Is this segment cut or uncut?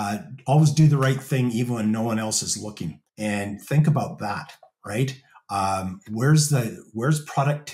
uncut